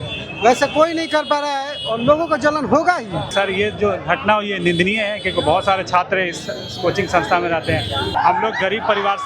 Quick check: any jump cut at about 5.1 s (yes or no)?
no